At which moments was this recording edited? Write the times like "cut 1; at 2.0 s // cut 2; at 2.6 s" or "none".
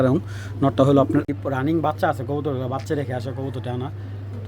cut 1; at 1.3 s